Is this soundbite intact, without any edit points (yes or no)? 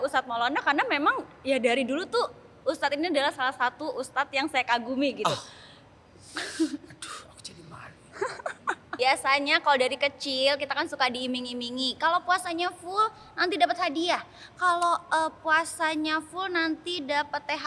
no